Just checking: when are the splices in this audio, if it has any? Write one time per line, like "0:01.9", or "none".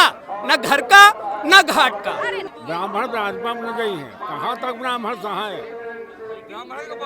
0:02.5